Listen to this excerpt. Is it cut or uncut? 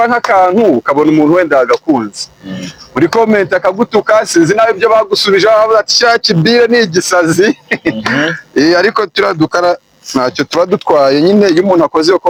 uncut